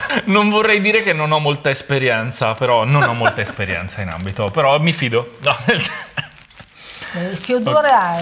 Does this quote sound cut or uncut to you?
uncut